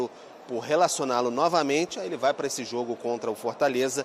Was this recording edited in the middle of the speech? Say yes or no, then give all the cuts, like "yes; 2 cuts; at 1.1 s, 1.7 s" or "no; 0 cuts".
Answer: no; 0 cuts